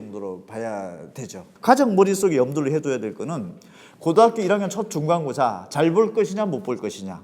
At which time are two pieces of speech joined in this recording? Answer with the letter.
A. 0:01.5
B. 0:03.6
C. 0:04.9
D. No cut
A